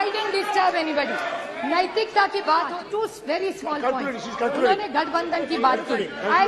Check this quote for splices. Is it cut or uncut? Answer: cut